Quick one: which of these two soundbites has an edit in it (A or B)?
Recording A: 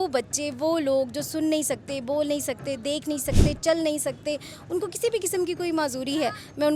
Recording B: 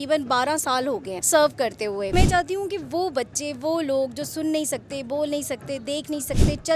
B